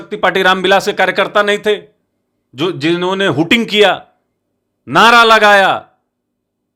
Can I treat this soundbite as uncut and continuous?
yes; 0 cuts

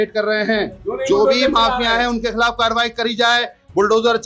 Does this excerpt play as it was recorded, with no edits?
yes; 0 cuts

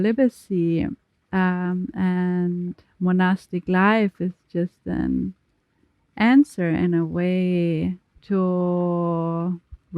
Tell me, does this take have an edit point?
yes; 1 cut; at 8.1 s

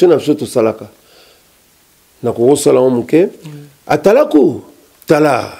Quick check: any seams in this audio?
no; 0 cuts

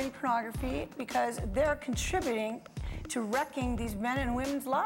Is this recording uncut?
yes; 0 cuts

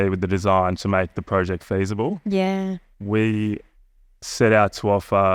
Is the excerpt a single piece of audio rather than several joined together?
yes; 0 cuts

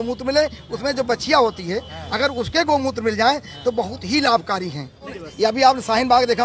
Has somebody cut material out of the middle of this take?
yes; 1 cut; at 5.2 s

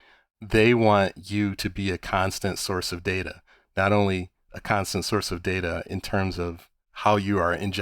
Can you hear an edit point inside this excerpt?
no; 0 cuts

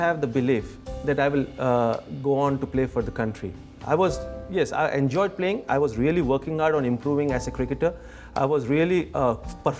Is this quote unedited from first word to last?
yes; 0 cuts

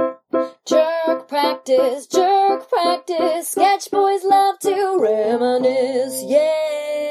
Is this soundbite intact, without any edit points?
yes; 0 cuts

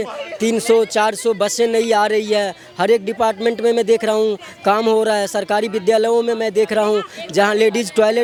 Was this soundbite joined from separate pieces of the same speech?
no; 0 cuts

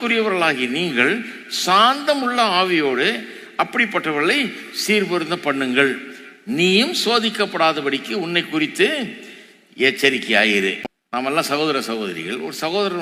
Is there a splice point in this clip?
no; 0 cuts

